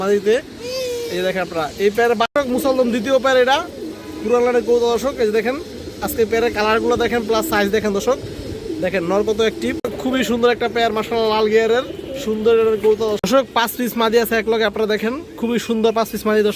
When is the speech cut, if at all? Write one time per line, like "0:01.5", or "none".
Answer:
0:02.3
0:09.9
0:13.4